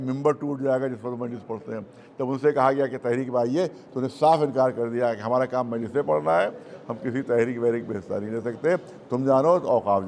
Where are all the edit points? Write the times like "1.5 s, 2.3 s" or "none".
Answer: none